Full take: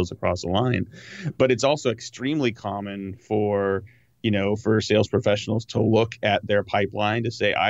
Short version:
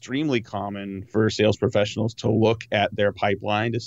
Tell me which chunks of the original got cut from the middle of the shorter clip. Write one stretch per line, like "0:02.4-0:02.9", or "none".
0:03.2-0:04.6